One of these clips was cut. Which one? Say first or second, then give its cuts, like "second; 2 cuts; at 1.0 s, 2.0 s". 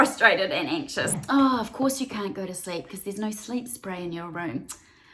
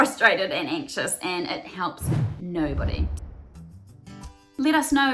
first; 1 cut; at 1.2 s